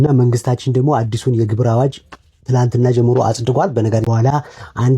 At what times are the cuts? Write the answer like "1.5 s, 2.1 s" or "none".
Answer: 4.1 s